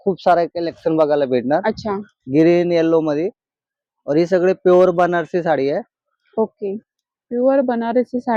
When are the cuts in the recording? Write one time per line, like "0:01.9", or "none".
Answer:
none

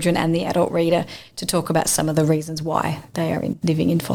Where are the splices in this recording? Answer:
none

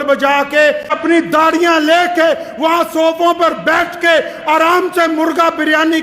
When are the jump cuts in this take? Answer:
0:00.9

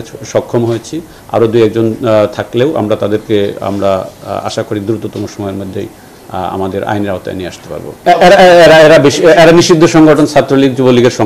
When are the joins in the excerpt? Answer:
none

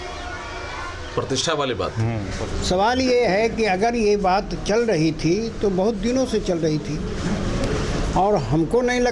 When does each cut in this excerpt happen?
0:02.3

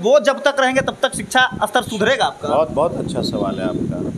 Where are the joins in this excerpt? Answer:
none

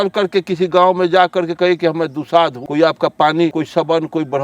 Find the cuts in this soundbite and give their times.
0:02.6
0:03.5

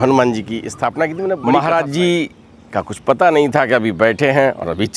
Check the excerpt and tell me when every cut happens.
0:01.3

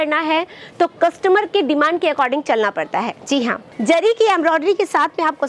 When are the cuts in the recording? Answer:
0:03.6

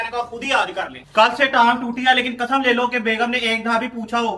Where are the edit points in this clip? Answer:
0:01.0

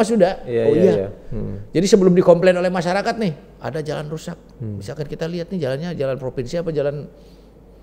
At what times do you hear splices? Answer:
none

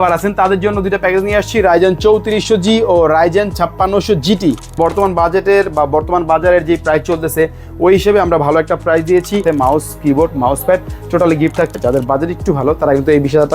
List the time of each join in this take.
0:04.8
0:09.4
0:11.7

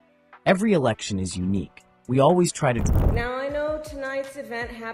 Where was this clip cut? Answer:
0:02.8

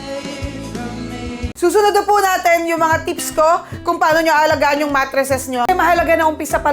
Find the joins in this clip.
0:01.5
0:05.6

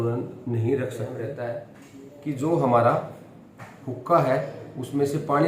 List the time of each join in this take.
0:01.2

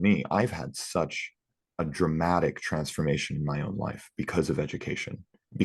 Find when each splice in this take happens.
none

